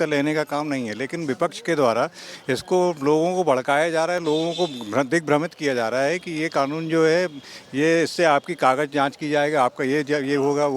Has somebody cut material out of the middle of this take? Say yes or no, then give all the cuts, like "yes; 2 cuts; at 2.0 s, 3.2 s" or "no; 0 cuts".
no; 0 cuts